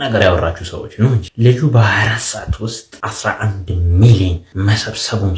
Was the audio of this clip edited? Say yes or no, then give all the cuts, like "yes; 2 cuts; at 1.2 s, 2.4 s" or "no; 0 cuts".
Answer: yes; 3 cuts; at 1.3 s, 2.9 s, 4.4 s